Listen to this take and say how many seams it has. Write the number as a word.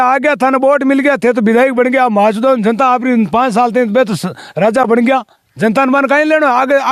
zero